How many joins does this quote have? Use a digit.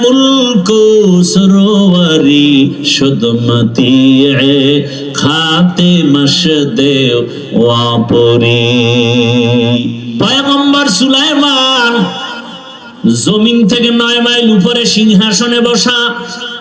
1